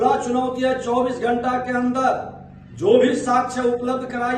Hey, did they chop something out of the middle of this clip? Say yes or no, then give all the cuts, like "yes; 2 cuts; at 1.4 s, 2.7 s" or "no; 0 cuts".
no; 0 cuts